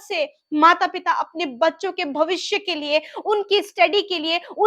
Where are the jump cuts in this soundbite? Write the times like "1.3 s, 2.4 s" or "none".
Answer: none